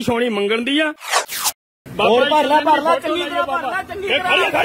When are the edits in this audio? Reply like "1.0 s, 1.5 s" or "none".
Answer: 1.4 s